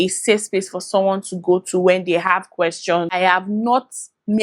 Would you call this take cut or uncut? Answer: cut